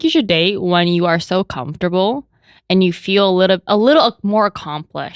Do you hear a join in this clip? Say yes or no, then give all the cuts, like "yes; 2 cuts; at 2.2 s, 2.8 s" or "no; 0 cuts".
no; 0 cuts